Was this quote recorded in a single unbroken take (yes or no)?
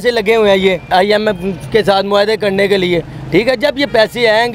no